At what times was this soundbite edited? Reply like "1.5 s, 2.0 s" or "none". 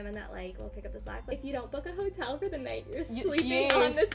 1.3 s